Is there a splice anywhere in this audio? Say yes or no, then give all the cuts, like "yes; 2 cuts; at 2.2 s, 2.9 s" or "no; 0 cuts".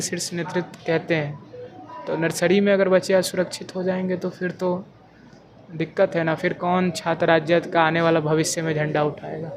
no; 0 cuts